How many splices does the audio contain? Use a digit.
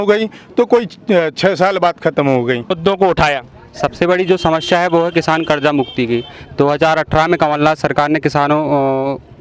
1